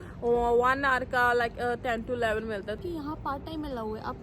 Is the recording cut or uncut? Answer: cut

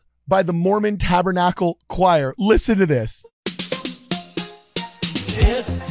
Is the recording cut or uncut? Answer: cut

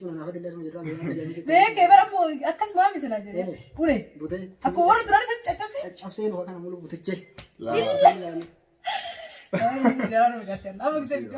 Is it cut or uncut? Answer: uncut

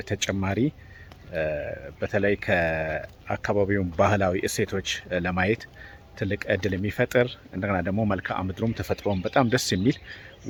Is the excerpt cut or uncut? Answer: uncut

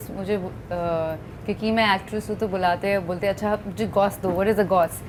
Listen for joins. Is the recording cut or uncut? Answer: uncut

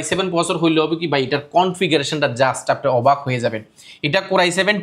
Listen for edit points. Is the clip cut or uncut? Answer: uncut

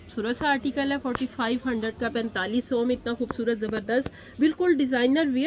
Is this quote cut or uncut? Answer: uncut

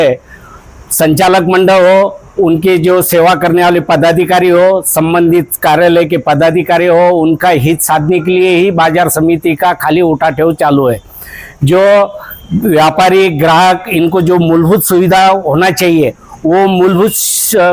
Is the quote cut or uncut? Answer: uncut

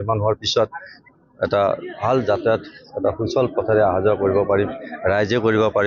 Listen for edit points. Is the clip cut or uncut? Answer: uncut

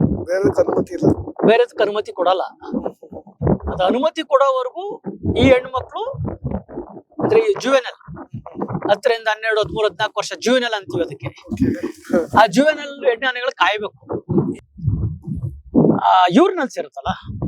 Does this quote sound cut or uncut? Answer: cut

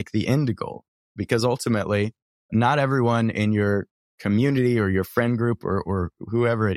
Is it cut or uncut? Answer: cut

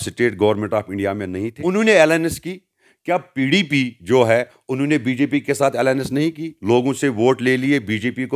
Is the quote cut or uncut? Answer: cut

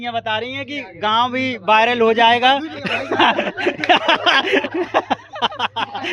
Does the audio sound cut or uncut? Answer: uncut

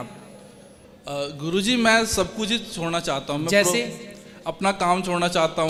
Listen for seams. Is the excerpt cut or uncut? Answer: uncut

